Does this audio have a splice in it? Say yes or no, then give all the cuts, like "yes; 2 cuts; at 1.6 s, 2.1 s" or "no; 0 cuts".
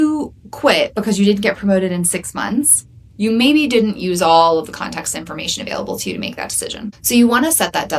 yes; 1 cut; at 7.0 s